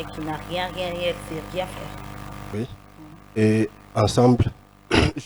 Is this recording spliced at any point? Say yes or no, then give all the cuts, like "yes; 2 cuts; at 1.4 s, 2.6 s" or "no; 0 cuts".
yes; 1 cut; at 2.5 s